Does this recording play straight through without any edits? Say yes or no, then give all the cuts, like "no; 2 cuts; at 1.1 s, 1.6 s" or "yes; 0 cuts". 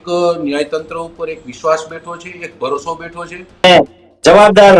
no; 1 cut; at 3.6 s